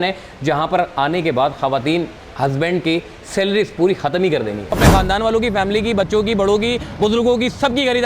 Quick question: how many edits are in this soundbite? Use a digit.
1